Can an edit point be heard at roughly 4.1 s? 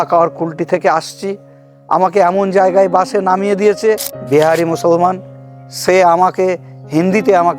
yes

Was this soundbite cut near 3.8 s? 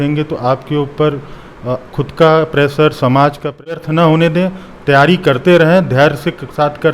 yes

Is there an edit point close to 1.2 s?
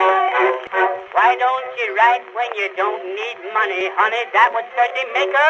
no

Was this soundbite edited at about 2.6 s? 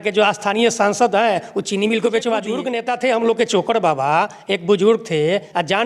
yes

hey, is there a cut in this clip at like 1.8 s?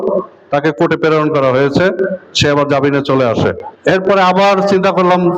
no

